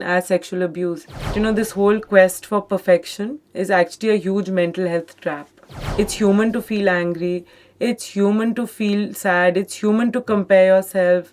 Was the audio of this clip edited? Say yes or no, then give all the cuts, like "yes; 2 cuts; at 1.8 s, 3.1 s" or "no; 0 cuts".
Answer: yes; 2 cuts; at 1.3 s, 5.8 s